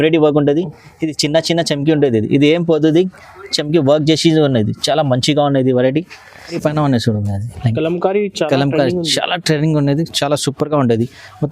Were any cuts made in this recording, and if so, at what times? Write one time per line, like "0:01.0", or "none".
0:06.6